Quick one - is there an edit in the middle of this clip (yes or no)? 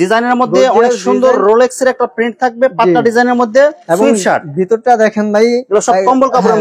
no